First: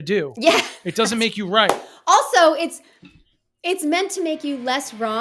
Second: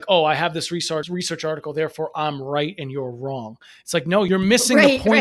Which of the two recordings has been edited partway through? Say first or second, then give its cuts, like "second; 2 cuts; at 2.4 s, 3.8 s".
second; 2 cuts; at 1.1 s, 4.3 s